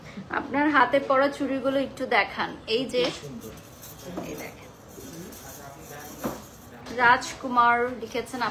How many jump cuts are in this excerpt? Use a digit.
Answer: 0